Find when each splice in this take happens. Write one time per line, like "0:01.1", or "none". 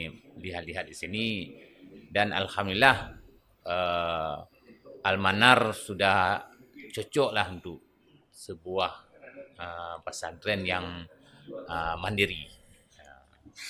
none

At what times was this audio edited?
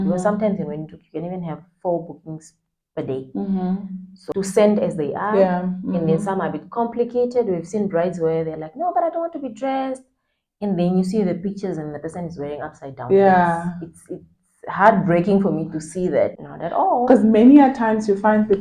0:04.1
0:16.5

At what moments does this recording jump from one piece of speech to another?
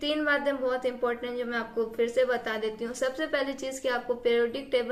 none

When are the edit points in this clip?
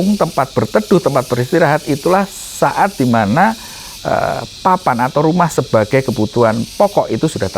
none

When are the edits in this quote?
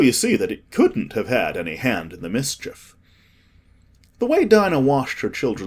0:02.2

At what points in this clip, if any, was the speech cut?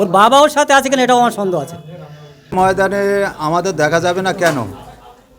0:02.5

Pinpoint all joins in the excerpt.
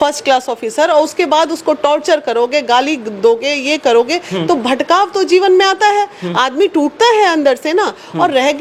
none

